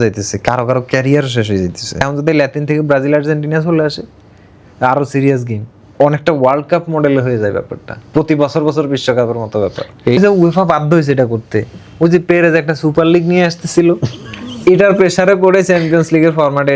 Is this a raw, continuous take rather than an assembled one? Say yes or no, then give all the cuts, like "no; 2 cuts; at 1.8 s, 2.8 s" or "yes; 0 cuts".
no; 2 cuts; at 2.0 s, 10.2 s